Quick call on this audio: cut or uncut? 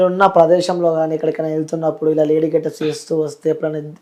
uncut